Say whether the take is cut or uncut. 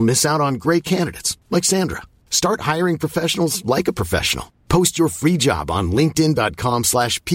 uncut